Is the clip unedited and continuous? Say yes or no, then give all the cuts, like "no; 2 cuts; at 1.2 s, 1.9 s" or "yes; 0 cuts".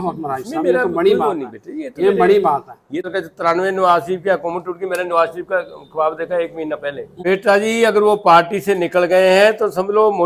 no; 2 cuts; at 3.1 s, 7.1 s